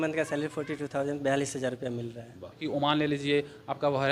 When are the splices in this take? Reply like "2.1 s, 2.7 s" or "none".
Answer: 2.6 s

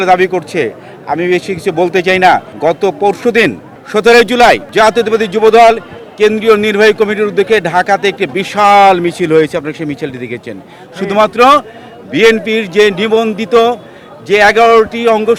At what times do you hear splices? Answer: none

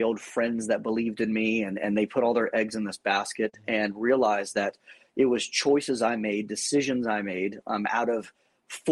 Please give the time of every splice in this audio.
none

